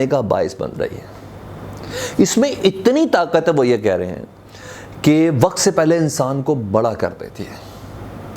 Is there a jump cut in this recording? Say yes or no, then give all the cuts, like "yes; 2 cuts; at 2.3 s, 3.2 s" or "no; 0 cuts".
no; 0 cuts